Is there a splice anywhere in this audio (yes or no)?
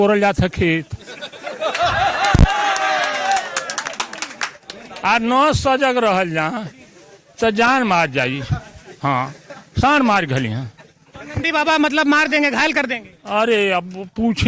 no